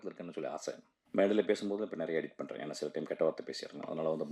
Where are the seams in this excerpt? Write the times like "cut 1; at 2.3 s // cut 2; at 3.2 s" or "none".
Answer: cut 1; at 0.9 s

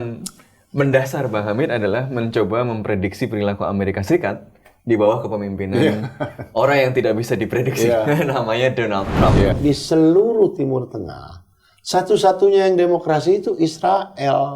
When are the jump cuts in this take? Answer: cut 1; at 9.5 s

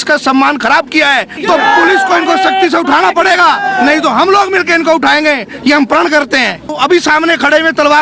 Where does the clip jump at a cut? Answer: cut 1; at 1.4 s // cut 2; at 6.7 s

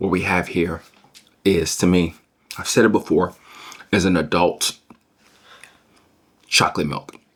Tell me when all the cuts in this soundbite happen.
none

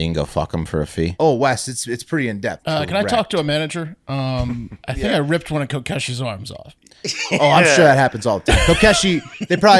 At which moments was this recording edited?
cut 1; at 1.1 s // cut 2; at 2.6 s // cut 3; at 4.7 s

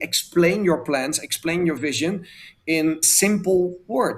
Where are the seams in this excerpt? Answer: cut 1; at 3.0 s

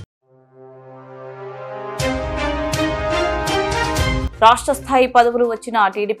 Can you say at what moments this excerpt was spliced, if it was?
none

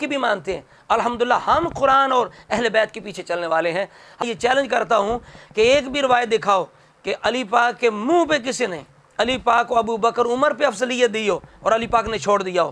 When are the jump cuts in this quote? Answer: cut 1; at 4.2 s

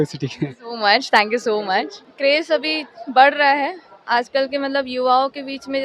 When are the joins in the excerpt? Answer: cut 1; at 2.0 s

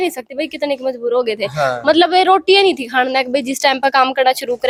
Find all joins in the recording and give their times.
none

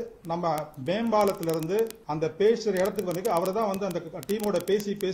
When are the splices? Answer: cut 1; at 2.0 s

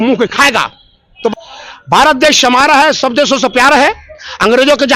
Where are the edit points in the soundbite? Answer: cut 1; at 1.3 s

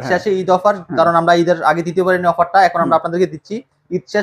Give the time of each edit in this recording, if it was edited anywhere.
none

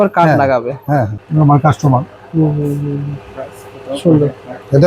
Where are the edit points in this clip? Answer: cut 1; at 1.6 s

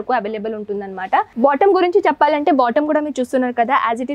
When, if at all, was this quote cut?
cut 1; at 1.3 s

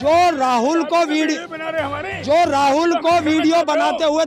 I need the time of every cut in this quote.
none

